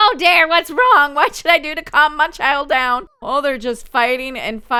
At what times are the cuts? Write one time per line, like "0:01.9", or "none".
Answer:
none